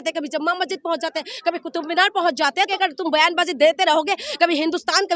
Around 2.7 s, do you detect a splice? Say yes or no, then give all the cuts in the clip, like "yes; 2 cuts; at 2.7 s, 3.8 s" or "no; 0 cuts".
yes; 1 cut; at 2.7 s